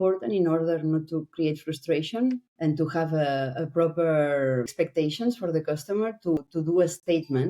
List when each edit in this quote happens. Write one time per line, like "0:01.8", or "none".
0:02.5
0:04.7
0:06.4